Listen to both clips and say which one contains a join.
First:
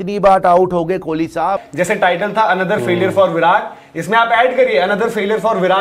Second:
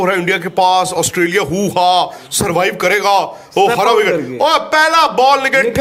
first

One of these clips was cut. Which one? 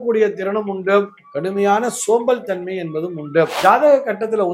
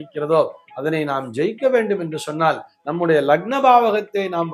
first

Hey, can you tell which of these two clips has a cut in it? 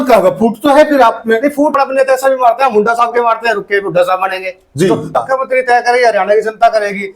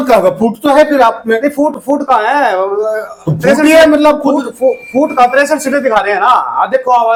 first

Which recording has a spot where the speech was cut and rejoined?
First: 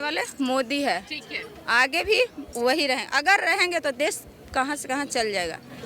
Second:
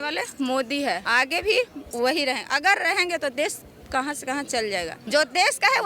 second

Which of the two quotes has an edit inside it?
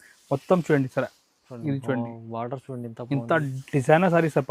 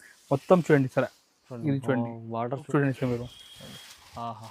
second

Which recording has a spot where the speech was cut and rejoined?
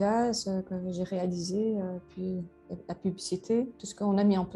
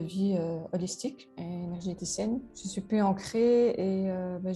second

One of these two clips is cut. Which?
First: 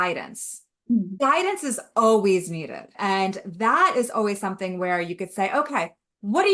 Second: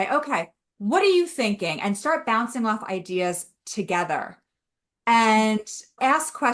first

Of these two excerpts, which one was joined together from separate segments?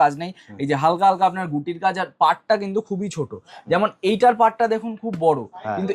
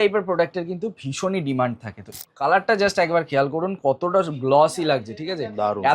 second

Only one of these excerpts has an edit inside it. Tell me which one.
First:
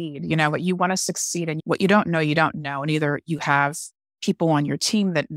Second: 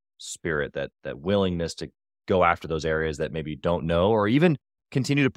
first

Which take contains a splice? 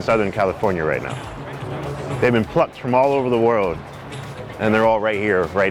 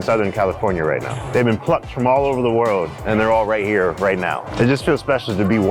second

